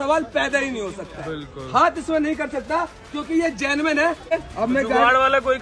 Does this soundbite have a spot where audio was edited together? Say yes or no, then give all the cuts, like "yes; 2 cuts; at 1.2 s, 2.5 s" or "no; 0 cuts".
yes; 1 cut; at 4.3 s